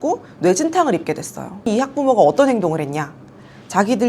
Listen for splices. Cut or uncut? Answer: cut